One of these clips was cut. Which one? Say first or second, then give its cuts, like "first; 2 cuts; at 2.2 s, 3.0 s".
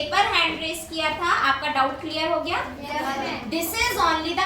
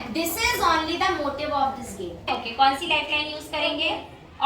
second; 1 cut; at 2.2 s